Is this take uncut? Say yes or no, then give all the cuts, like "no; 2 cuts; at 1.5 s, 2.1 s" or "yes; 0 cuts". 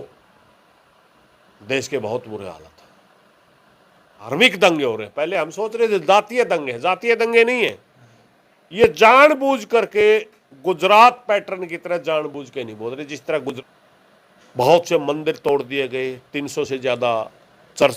no; 2 cuts; at 4.3 s, 13.6 s